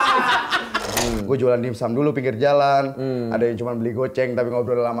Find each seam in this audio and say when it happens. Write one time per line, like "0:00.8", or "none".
0:00.9